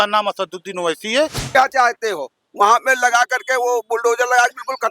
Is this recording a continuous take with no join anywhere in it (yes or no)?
no